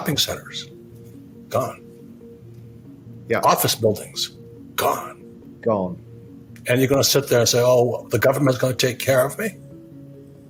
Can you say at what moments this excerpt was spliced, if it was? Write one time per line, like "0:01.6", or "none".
none